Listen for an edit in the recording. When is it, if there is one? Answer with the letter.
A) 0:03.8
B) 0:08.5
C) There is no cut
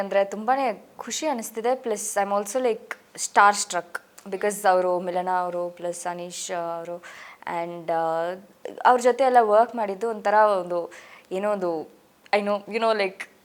C